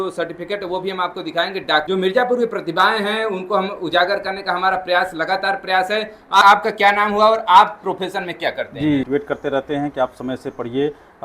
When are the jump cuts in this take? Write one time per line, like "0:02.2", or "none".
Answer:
0:01.8
0:06.4
0:09.1